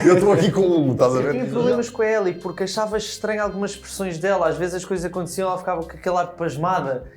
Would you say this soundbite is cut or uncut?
cut